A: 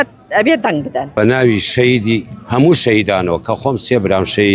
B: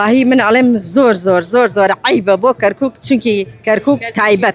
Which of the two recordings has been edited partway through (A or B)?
A